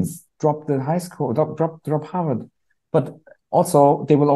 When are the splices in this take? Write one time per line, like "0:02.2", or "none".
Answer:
none